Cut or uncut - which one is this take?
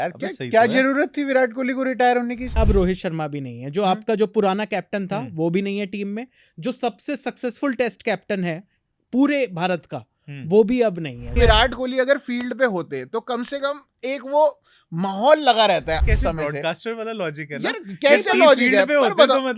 cut